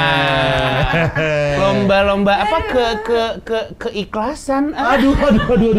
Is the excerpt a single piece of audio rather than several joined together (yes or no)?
yes